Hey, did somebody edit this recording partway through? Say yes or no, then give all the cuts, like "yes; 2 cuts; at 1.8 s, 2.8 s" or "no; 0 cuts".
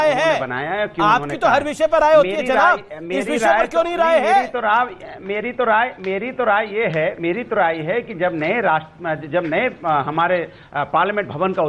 no; 0 cuts